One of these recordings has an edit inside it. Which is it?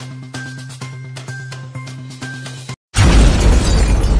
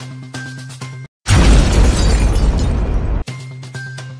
second; 1 cut; at 1.0 s

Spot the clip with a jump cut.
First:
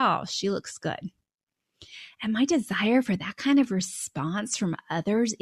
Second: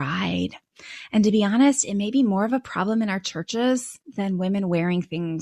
second; 1 cut; at 4.0 s

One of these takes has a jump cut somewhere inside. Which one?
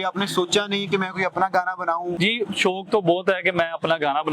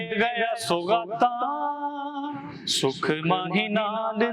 first; 1 cut; at 2.2 s

